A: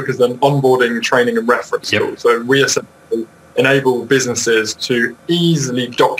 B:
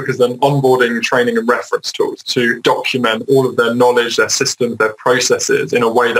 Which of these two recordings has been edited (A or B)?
B